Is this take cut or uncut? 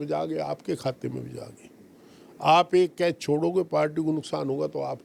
uncut